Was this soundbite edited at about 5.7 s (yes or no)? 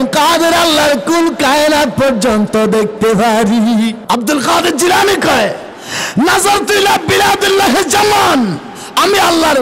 no